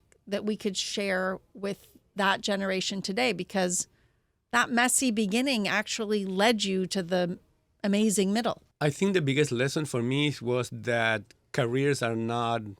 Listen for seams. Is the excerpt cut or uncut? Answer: cut